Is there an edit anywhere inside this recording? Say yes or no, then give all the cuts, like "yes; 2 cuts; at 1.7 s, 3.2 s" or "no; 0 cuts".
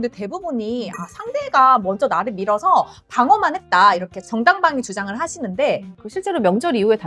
yes; 1 cut; at 5.9 s